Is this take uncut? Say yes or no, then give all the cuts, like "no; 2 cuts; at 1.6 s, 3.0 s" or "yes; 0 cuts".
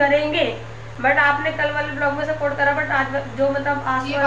yes; 0 cuts